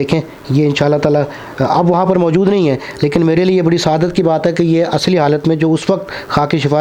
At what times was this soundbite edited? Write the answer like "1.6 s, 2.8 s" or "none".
none